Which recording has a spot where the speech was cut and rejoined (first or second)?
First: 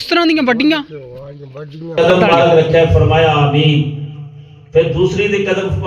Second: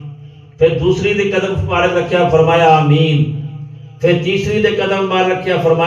first